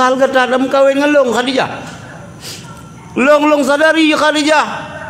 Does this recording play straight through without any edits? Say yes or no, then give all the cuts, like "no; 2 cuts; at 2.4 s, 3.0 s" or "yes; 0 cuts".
yes; 0 cuts